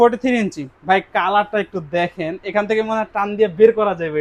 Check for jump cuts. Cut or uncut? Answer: uncut